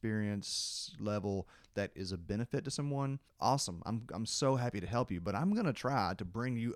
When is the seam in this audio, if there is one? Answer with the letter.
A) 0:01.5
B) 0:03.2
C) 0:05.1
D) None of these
B